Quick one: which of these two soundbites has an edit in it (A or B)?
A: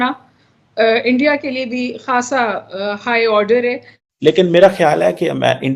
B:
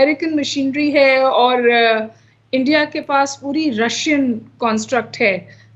A